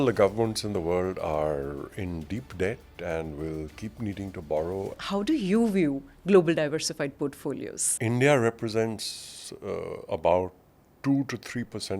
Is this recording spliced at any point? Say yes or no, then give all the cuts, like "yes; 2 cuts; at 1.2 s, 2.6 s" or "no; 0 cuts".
yes; 2 cuts; at 5.0 s, 7.8 s